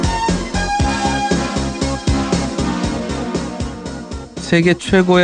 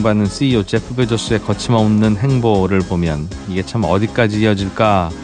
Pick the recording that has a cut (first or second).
first